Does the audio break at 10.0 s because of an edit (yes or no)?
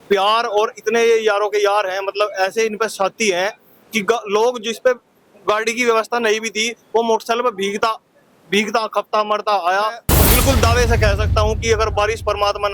yes